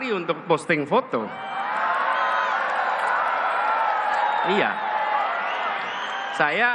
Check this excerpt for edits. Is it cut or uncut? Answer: uncut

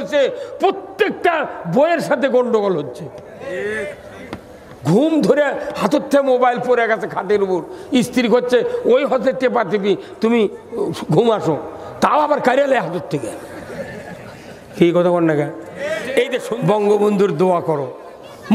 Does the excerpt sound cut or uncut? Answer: cut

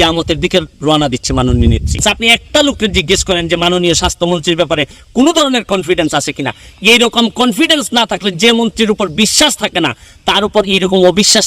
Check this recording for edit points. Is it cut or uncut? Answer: cut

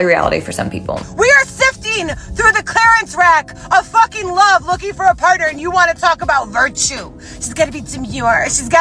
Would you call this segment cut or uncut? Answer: cut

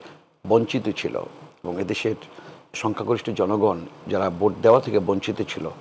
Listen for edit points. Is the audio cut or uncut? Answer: uncut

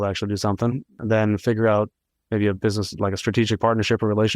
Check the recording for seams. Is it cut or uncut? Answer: cut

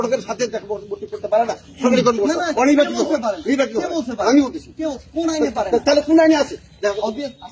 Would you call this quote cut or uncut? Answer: uncut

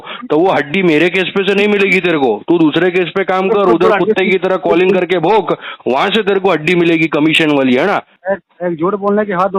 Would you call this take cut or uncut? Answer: cut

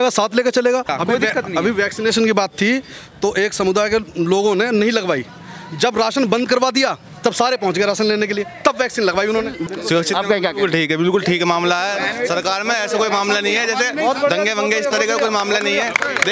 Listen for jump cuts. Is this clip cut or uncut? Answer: cut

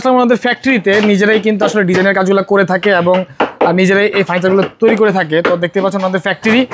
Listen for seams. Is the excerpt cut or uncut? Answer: uncut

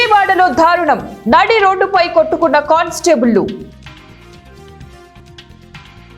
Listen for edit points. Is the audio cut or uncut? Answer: cut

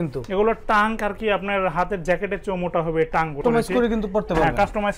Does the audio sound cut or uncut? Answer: cut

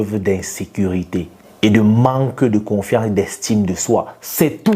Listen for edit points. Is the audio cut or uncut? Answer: cut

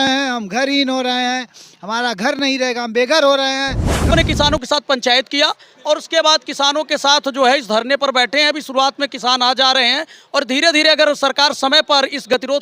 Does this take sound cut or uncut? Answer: cut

